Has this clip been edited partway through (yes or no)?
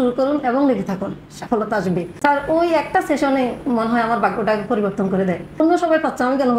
yes